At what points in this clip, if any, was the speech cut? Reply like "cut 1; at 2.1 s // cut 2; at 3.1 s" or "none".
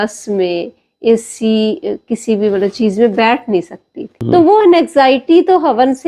cut 1; at 4.2 s